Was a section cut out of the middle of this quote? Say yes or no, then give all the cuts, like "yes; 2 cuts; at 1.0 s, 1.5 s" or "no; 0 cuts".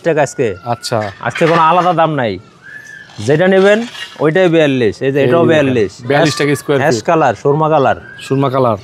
no; 0 cuts